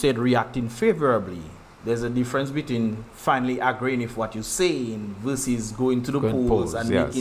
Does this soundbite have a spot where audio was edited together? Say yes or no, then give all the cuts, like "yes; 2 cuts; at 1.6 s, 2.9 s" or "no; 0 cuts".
no; 0 cuts